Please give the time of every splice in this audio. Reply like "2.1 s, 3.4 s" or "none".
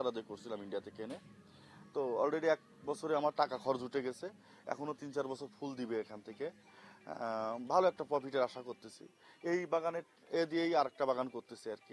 none